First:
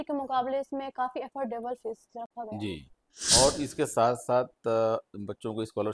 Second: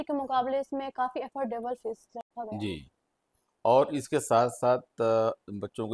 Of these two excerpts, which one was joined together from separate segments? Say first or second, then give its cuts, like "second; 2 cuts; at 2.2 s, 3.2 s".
first; 1 cut; at 3.4 s